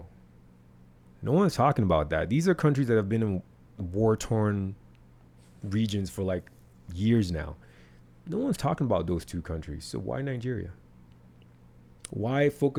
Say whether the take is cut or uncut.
uncut